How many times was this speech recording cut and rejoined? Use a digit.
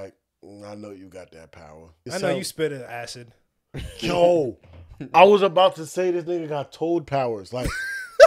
1